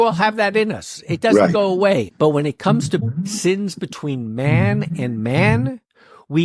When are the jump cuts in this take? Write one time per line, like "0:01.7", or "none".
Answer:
0:02.1
0:03.0

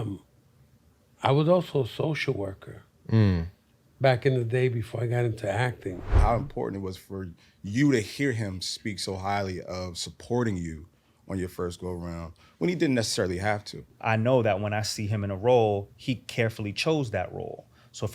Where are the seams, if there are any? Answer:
0:06.1
0:13.9

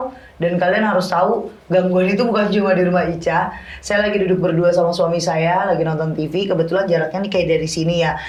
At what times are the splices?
none

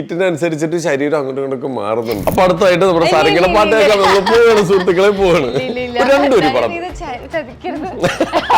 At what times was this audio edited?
0:02.2

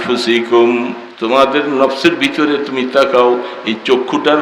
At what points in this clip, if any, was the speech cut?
0:01.0

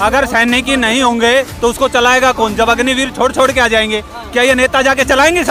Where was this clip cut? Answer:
none

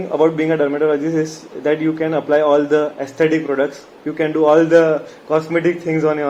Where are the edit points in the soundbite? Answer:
none

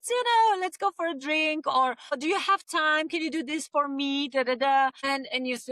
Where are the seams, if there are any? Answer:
0:02.2
0:05.0

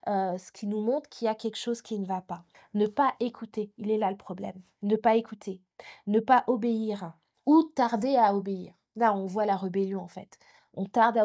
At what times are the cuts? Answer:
0:02.5

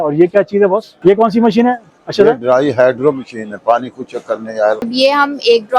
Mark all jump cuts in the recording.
0:00.9
0:04.9

